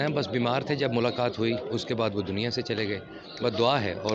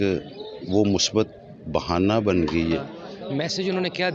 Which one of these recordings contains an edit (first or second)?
second